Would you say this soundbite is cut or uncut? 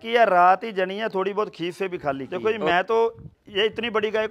cut